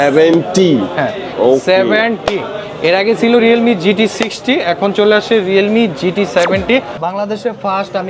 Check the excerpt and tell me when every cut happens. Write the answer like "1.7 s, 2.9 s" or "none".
6.9 s